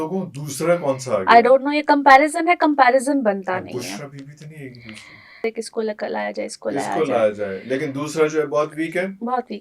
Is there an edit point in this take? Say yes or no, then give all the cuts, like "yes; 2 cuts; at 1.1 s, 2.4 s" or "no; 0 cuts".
yes; 1 cut; at 5.4 s